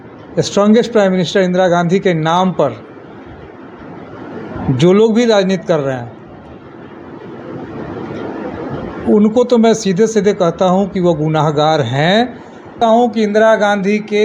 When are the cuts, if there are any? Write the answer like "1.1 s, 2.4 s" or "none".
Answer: 12.7 s